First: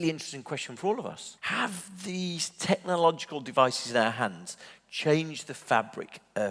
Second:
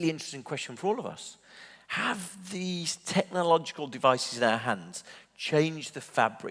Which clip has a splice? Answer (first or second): first